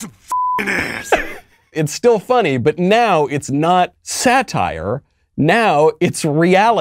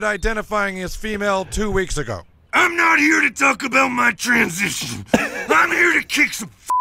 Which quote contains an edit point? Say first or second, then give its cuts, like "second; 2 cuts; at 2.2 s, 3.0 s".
first; 2 cuts; at 1.7 s, 4.0 s